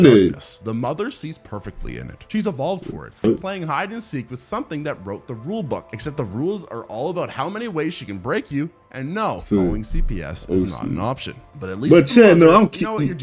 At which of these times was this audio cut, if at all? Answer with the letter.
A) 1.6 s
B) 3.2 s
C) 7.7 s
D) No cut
B